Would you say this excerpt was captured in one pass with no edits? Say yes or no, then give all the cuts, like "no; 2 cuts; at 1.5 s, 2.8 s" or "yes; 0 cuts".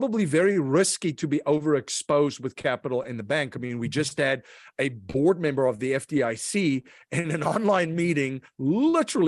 yes; 0 cuts